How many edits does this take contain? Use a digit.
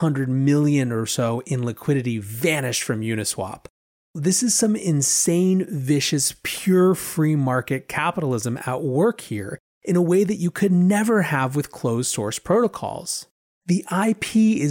1